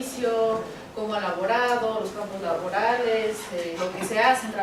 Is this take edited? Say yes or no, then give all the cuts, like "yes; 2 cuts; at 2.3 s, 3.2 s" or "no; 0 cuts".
no; 0 cuts